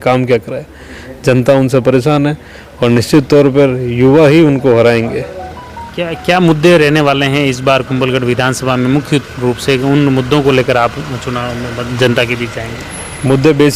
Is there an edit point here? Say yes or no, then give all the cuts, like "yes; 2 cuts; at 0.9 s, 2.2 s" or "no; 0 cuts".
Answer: no; 0 cuts